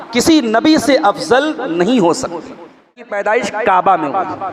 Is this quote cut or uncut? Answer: cut